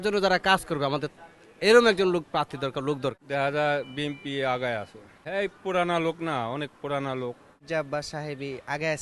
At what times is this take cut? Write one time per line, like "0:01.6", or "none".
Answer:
0:03.2
0:07.6